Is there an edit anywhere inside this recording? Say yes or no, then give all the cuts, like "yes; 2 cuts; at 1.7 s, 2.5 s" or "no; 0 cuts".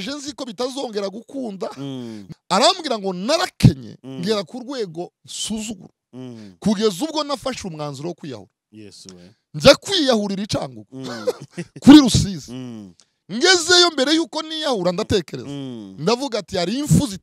yes; 1 cut; at 2.2 s